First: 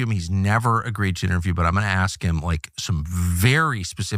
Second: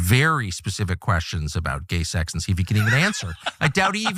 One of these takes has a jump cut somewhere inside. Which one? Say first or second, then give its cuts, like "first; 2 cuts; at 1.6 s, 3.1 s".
first; 1 cut; at 1.6 s